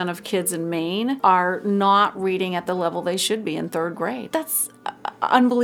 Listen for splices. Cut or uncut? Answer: cut